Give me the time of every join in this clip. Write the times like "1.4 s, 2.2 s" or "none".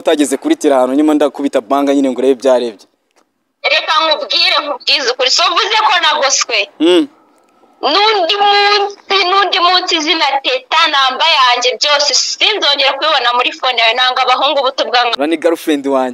15.1 s